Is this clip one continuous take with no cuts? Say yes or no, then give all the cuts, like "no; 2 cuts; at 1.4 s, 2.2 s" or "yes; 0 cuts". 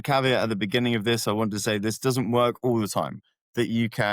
no; 1 cut; at 3.2 s